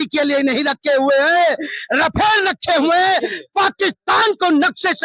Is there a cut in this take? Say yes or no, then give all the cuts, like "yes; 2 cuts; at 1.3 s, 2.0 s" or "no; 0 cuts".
no; 0 cuts